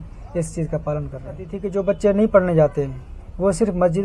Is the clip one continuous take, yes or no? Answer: no